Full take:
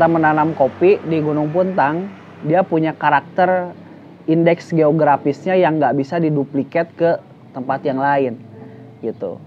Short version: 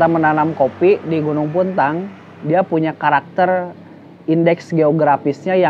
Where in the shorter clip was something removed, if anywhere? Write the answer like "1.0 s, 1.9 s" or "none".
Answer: none